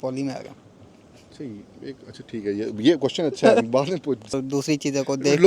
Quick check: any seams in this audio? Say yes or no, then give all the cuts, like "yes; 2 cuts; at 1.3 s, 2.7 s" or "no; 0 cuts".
yes; 1 cut; at 4.4 s